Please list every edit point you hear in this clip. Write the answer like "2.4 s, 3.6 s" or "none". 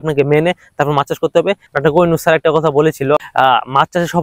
1.7 s, 3.2 s